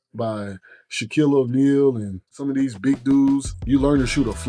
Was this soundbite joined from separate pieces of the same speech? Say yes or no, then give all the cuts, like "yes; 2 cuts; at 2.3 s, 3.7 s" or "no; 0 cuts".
yes; 2 cuts; at 2.4 s, 3.5 s